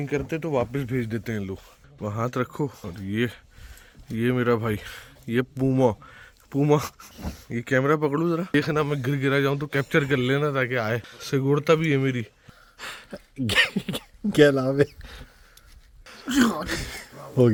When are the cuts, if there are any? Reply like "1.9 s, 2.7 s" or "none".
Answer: none

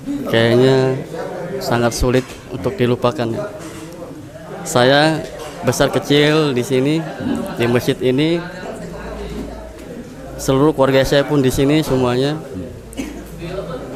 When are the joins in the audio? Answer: none

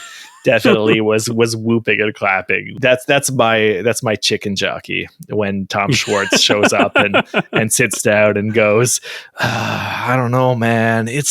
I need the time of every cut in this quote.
2.7 s

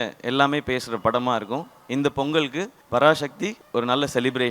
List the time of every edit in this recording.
2.7 s, 3.5 s

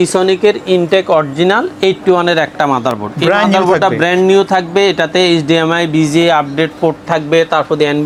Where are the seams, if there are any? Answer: none

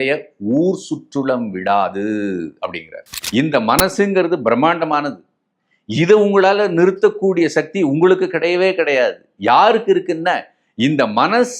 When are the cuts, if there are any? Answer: 3.2 s

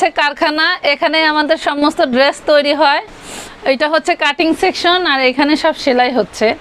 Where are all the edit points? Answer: none

